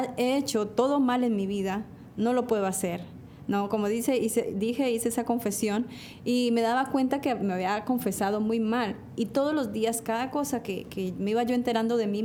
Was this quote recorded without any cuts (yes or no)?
yes